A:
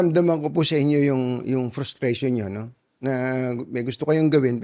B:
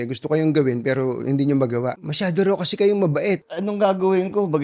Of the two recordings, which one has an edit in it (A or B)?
B